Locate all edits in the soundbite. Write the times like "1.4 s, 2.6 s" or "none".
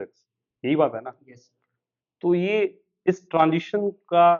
none